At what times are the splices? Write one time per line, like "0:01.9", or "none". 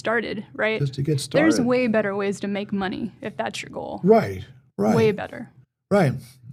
none

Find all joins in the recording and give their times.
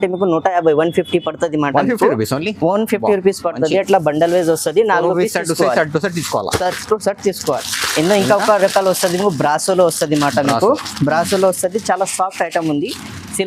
none

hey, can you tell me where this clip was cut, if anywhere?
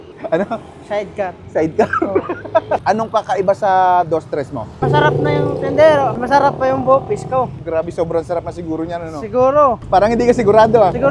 0:02.8
0:07.6

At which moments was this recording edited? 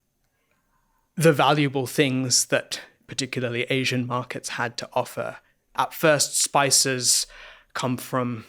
0:05.5

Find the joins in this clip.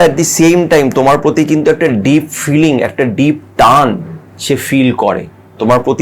none

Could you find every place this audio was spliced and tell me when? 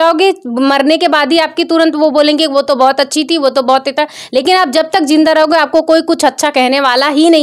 none

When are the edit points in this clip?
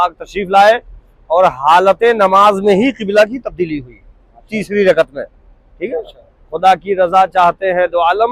none

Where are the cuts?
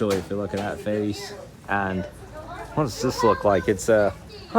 none

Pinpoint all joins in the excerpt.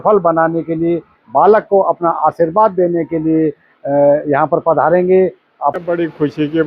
0:05.8

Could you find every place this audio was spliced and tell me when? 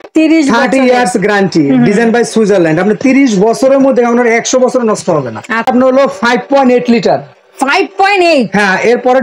0:05.7

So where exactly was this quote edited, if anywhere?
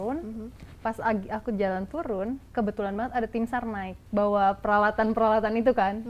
0:02.4
0:03.9

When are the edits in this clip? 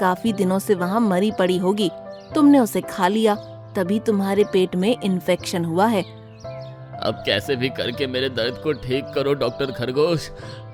none

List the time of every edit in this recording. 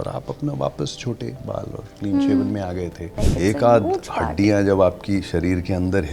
0:03.2

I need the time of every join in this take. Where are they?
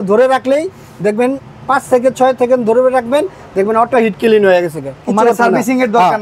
none

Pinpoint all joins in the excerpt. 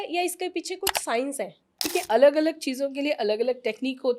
0:01.9

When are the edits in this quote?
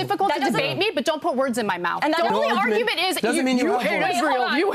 0:02.3

